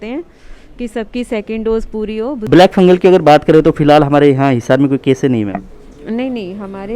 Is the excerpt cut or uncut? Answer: cut